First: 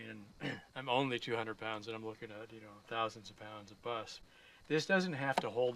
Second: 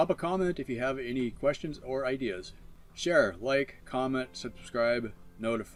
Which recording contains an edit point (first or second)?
first